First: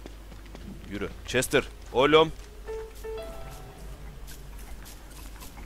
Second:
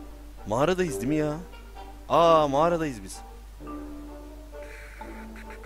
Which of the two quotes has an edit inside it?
first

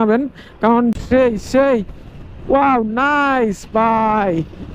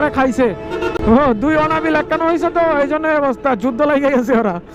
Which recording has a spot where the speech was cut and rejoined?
first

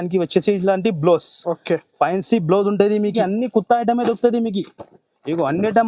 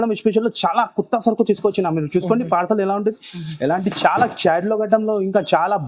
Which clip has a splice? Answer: first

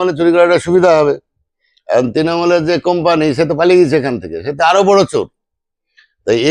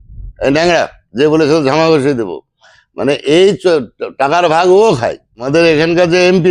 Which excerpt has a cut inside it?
second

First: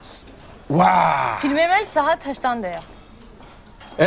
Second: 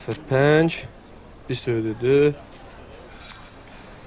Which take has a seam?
second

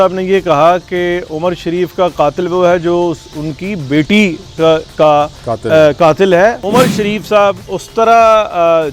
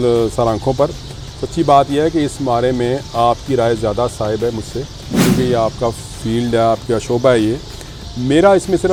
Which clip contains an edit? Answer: first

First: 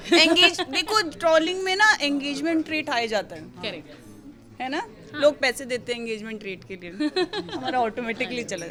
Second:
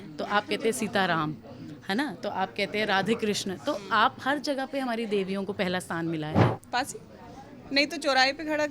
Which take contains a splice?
second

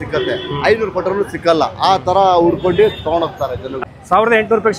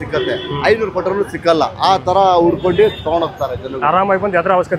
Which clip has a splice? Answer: first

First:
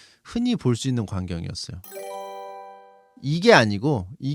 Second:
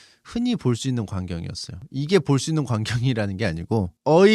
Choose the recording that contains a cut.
second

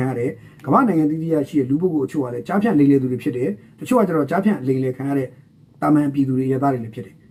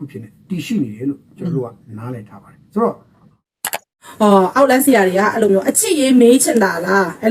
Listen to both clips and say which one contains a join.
second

